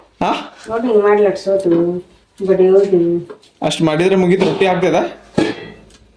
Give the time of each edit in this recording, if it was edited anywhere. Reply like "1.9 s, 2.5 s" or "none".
none